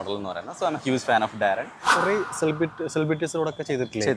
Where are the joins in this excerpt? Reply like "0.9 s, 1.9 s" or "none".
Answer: 1.9 s